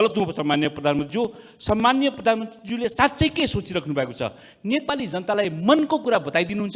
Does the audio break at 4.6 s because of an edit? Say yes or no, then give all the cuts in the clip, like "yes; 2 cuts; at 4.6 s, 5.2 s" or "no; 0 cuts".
no; 0 cuts